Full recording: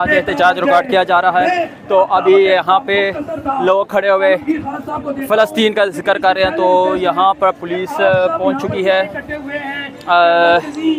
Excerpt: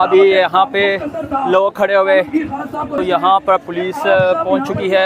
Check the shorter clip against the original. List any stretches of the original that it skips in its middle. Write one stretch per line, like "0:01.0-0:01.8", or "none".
0:05.1-0:06.9